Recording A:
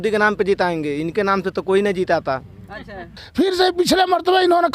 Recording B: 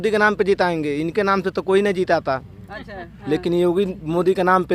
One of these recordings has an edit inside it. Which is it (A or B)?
A